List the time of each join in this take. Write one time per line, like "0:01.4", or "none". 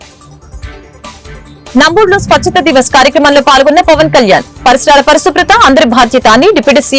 0:01.4